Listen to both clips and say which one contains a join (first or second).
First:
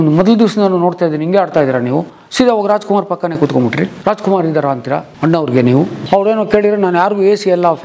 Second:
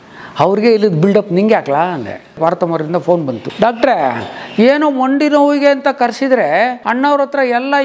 second